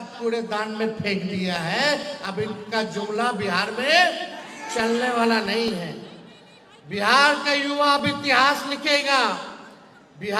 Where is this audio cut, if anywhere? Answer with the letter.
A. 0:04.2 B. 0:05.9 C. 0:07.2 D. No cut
D